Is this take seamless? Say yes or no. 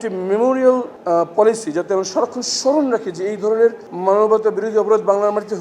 no